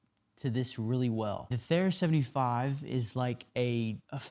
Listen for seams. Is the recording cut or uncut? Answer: cut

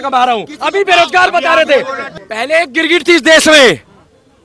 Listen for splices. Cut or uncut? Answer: cut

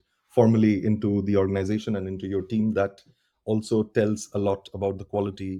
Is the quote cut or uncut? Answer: uncut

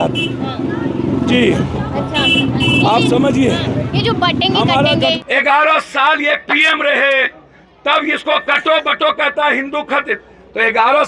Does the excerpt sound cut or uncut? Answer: cut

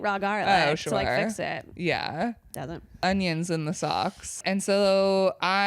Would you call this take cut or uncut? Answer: cut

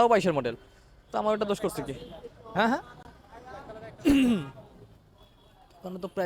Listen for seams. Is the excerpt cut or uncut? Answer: uncut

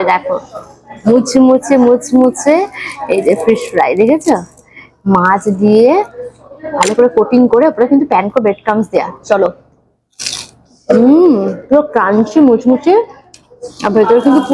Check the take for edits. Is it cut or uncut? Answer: uncut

